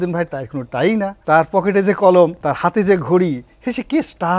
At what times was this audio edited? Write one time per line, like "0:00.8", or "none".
0:01.2
0:02.4

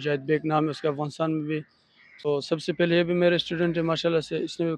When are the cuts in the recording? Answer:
0:02.3

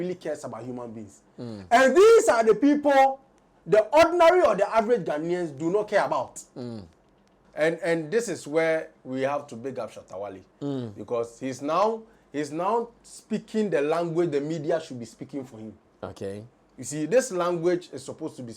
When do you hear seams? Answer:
0:07.4

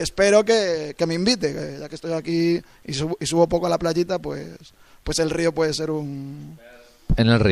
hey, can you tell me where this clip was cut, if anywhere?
none

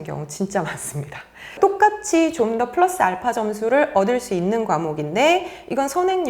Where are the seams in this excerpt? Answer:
0:01.6

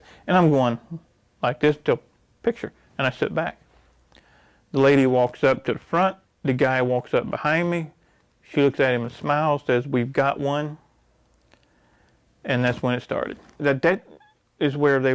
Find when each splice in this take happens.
0:13.6

